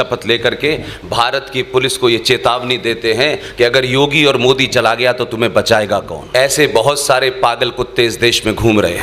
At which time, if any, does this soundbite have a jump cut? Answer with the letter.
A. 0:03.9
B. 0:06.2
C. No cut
B